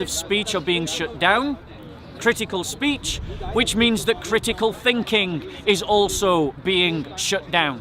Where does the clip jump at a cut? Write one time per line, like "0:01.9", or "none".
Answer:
none